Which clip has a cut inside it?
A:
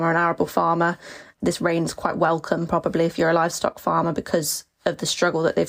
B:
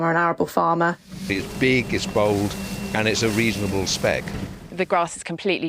B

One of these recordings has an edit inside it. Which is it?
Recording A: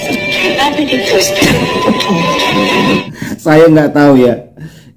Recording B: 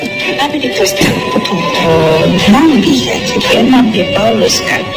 A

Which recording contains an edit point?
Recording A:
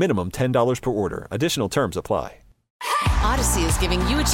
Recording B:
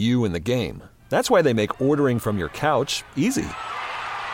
A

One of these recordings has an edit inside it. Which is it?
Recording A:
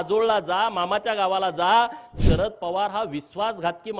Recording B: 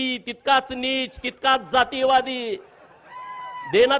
A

